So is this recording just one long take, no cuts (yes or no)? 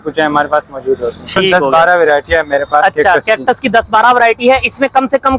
no